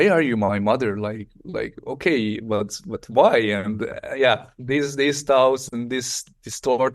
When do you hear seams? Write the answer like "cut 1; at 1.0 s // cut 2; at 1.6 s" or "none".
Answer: none